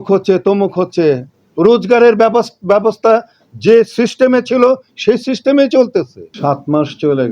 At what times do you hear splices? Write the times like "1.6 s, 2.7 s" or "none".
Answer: 6.2 s